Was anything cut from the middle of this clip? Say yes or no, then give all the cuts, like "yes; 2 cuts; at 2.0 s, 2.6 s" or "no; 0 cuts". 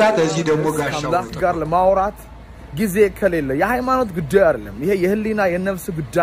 yes; 1 cut; at 1.0 s